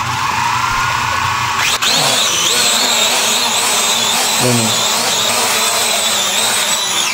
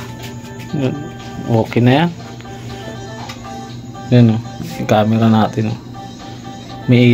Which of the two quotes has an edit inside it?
first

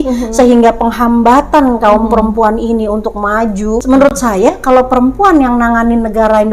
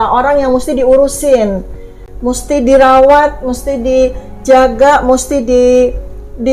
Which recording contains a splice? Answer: first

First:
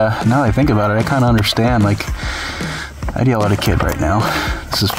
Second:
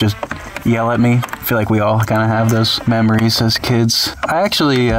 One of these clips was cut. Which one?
second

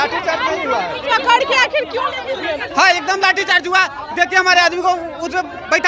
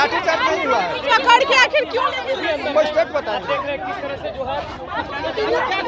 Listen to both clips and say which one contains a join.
first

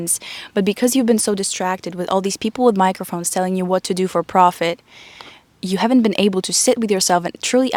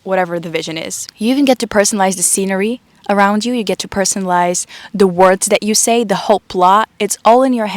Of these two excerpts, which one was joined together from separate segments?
second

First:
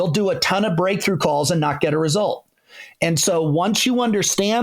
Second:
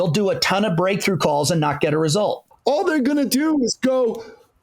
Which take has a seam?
second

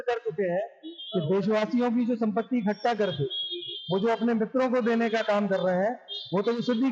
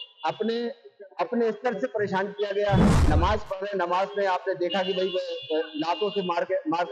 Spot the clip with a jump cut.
second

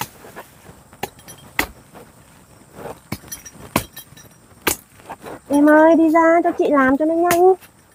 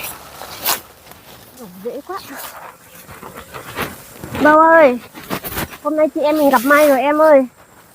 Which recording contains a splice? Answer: second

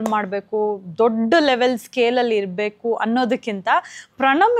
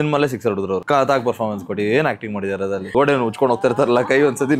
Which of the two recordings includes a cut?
second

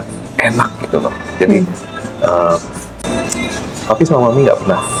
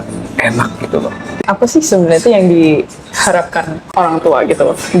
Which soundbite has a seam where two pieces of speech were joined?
second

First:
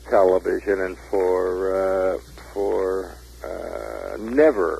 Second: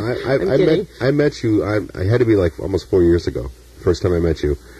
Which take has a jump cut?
second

